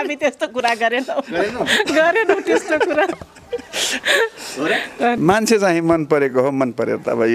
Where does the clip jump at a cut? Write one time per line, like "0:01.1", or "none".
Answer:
0:05.2